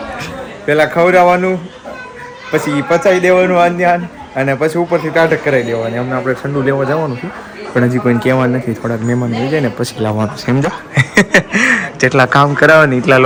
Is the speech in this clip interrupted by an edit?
no; 0 cuts

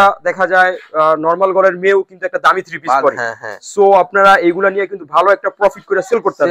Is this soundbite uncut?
yes; 0 cuts

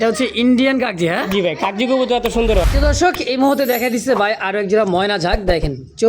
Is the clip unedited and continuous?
no; 1 cut; at 2.6 s

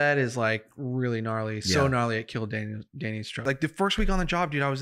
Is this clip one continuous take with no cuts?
no; 1 cut; at 3.4 s

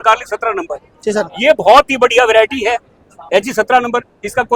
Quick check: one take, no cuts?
yes; 0 cuts

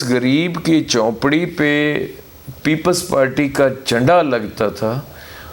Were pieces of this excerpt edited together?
no; 0 cuts

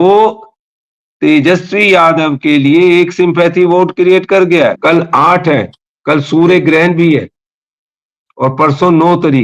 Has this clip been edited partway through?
yes; 1 cut; at 4.8 s

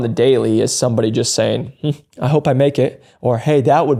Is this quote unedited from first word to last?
yes; 0 cuts

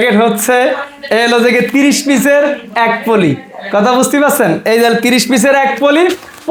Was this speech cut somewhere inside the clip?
no; 0 cuts

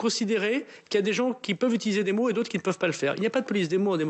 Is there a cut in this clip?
no; 0 cuts

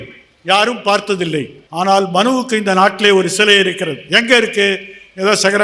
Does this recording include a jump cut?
yes; 1 cut; at 1.6 s

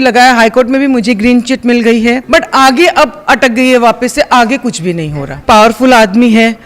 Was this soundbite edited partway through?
yes; 2 cuts; at 2.2 s, 5.4 s

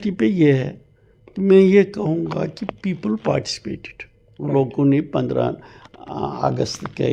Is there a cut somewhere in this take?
no; 0 cuts

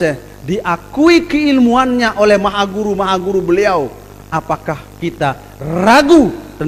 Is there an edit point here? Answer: no; 0 cuts

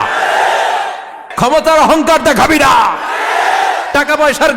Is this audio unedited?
no; 1 cut; at 1.2 s

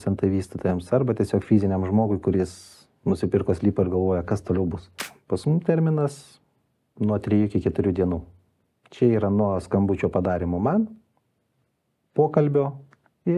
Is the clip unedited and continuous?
no; 1 cut; at 5.0 s

